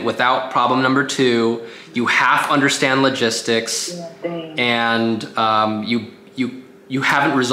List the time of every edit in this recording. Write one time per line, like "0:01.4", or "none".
none

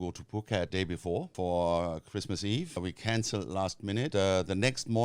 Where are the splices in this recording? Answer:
0:01.2
0:02.8
0:04.1

